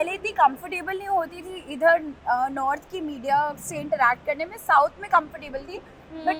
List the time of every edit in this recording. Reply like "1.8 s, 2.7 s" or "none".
none